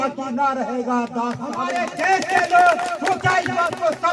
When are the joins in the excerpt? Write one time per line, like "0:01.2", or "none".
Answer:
0:01.6